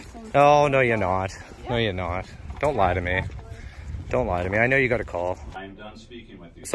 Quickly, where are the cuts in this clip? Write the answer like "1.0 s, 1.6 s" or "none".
5.4 s